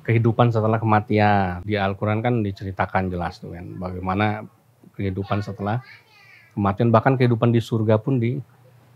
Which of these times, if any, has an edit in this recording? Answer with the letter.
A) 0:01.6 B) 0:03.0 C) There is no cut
A